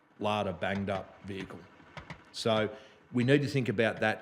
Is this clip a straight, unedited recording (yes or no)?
yes